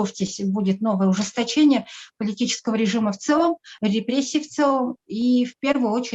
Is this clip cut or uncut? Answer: uncut